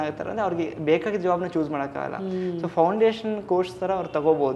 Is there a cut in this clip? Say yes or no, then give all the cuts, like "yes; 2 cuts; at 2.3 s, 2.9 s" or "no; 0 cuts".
no; 0 cuts